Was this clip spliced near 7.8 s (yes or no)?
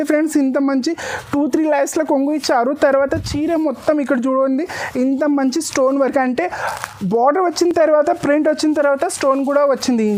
no